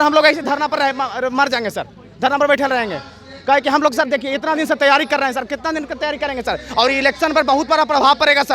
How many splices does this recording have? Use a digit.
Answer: 0